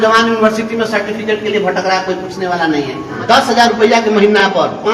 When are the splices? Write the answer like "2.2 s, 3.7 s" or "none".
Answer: 3.2 s

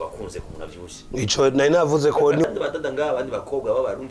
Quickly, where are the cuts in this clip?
2.4 s

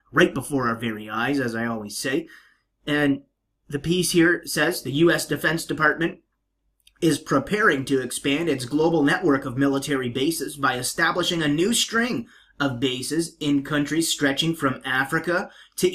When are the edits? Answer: 13.3 s

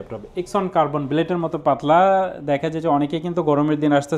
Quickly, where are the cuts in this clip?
none

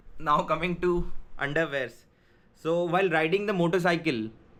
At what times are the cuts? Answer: none

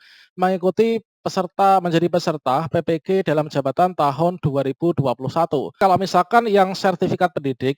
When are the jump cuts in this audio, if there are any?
5.8 s

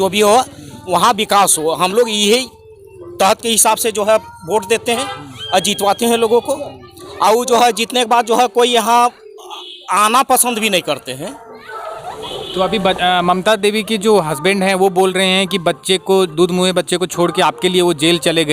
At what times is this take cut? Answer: none

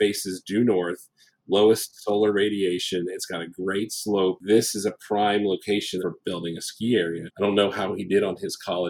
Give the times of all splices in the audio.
4.4 s, 6.1 s, 7.3 s

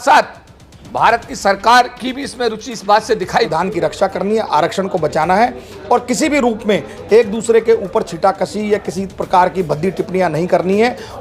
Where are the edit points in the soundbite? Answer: 3.5 s

